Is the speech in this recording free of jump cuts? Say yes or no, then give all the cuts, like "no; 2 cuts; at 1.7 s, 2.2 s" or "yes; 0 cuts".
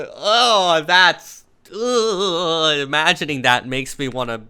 yes; 0 cuts